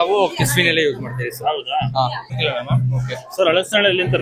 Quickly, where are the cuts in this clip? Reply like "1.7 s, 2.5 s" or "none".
2.4 s